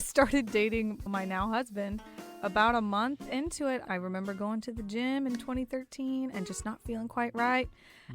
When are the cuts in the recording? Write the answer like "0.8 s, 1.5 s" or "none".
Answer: 1.1 s